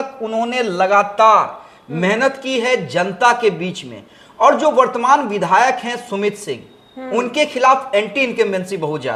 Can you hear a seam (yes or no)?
no